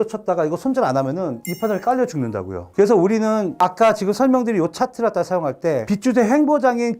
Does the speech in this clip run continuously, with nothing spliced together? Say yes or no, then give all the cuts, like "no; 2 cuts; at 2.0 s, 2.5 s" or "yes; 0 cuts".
yes; 0 cuts